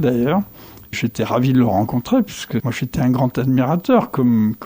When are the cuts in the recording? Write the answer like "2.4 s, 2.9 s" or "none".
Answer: 1.0 s, 2.7 s